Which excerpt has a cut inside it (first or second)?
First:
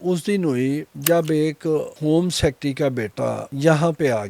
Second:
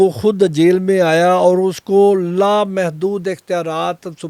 first